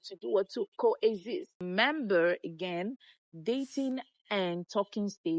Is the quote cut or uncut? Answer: cut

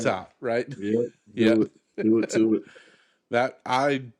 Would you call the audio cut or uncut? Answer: uncut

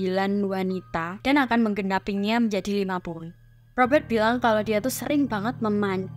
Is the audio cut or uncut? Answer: uncut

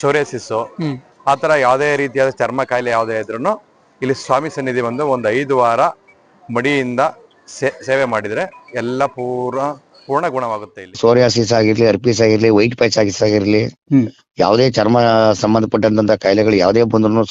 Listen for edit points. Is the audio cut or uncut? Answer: cut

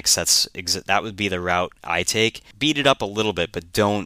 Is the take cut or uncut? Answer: cut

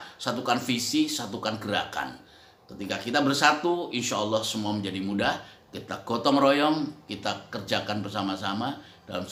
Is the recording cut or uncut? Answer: uncut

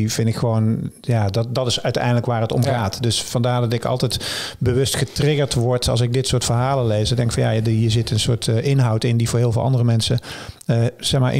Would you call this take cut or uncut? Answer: uncut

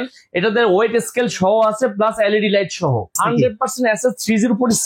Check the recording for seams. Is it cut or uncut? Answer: cut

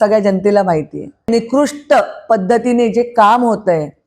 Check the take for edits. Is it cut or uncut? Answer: cut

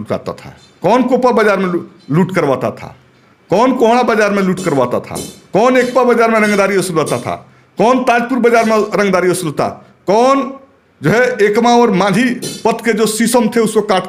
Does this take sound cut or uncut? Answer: uncut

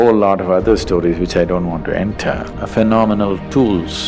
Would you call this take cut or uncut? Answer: cut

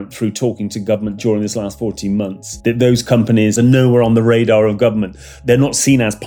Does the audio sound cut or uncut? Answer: cut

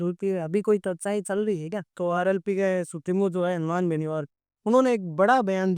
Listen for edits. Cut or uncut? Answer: cut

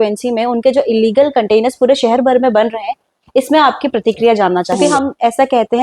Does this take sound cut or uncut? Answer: cut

